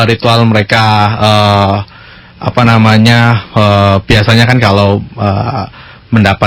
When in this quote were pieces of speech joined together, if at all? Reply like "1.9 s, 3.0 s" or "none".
none